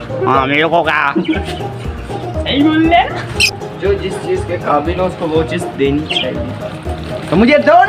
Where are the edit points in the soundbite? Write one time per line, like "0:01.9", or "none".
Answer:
0:03.3